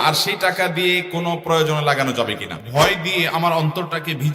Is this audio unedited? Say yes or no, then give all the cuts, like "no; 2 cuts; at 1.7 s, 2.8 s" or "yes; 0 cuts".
no; 1 cut; at 2.6 s